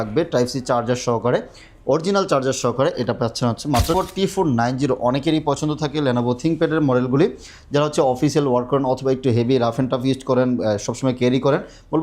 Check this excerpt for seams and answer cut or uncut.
cut